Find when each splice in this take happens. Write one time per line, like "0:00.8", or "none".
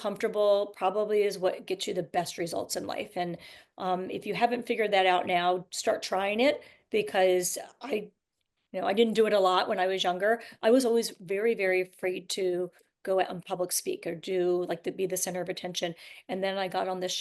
none

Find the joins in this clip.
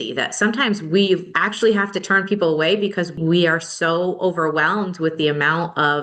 0:01.4
0:03.1

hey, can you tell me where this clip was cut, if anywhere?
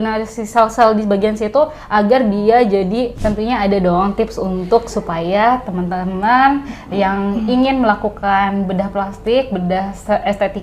0:03.1

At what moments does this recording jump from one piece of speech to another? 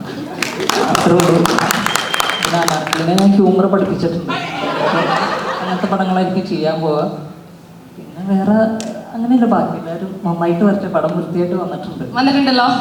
none

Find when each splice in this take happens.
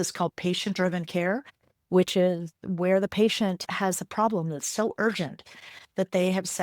0:03.7

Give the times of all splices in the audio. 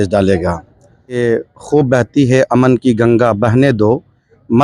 0:01.2

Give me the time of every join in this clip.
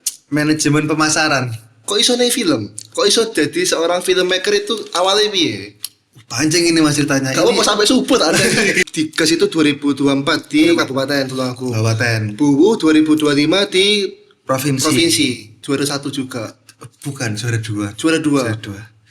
0:08.8
0:15.5

